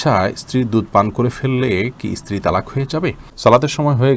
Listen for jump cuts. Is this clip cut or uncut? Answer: cut